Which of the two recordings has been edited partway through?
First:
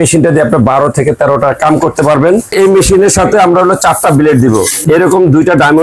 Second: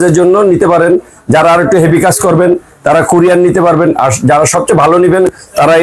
first; 2 cuts; at 2.5 s, 4.7 s

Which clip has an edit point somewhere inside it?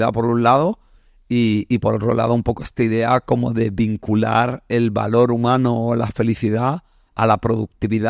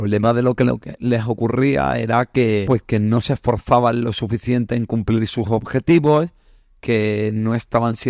second; 1 cut; at 2.7 s

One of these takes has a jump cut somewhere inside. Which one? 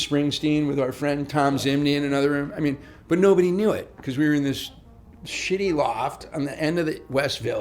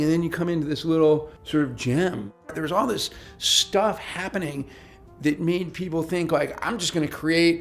second; 2 cuts; at 1.4 s, 2.5 s

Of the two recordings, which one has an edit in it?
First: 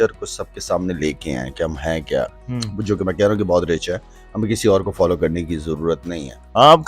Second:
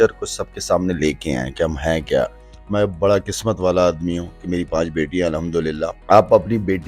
second; 2 cuts; at 2.4 s, 6.0 s

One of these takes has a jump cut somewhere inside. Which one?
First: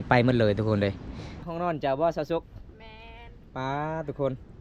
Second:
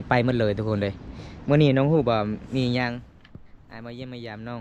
first; 1 cut; at 1.4 s

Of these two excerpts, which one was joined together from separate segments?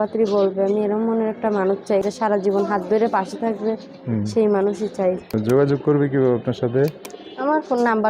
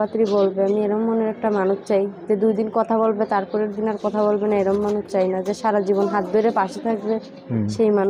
first; 2 cuts; at 2.0 s, 5.2 s

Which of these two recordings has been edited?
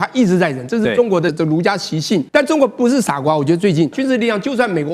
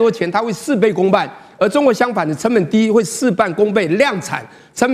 first; 3 cuts; at 1.3 s, 2.3 s, 4.0 s

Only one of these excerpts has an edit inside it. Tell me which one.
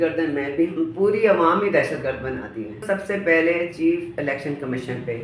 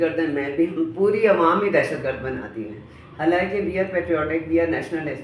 first; 1 cut; at 2.8 s

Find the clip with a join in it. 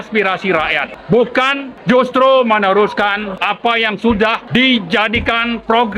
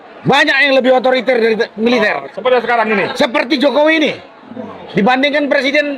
first; 4 cuts; at 0.9 s, 1.7 s, 3.3 s, 4.4 s

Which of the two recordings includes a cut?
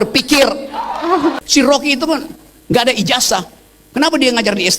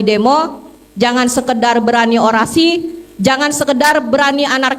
first; 1 cut; at 1.4 s

